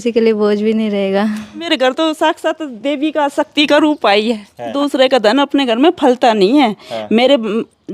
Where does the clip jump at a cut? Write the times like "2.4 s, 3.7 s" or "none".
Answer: 1.7 s, 4.7 s